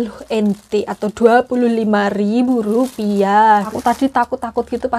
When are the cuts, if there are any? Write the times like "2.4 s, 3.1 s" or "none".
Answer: 3.7 s